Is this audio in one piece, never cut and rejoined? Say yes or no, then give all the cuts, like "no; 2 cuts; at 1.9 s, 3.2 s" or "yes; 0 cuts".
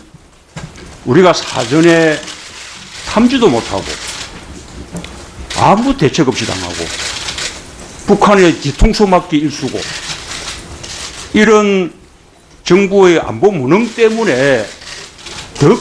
no; 1 cut; at 12.9 s